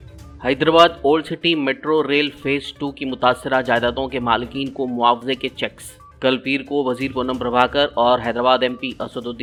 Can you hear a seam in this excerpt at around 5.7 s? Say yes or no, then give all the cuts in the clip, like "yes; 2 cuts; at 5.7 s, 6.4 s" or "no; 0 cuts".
no; 0 cuts